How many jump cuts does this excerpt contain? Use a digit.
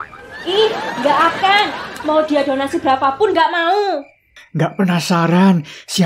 1